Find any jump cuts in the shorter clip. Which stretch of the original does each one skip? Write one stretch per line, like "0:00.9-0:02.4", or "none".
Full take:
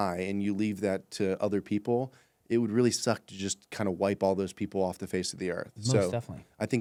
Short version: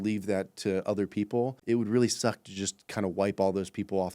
0:02.1-0:02.4